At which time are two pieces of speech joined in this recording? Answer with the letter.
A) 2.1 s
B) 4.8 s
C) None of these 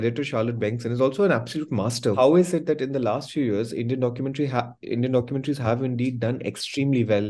A